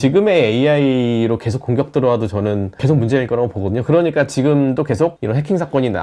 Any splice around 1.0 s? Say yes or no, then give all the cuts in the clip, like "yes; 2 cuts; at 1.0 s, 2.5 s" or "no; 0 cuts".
no; 2 cuts; at 2.8 s, 5.2 s